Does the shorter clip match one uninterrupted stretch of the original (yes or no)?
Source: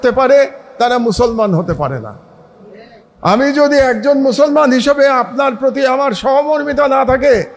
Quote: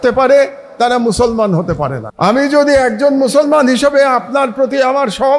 no